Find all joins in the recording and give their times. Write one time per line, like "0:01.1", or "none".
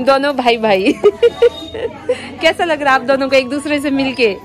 none